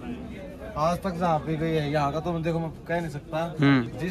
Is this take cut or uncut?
uncut